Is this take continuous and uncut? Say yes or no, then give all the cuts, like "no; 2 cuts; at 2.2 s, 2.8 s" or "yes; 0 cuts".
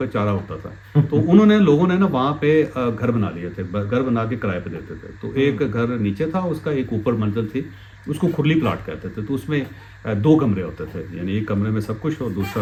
yes; 0 cuts